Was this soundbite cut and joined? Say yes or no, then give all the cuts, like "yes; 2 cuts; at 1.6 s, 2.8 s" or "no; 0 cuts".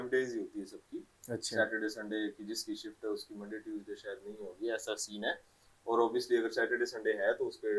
no; 0 cuts